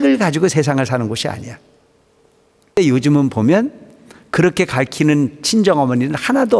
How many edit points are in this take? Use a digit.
1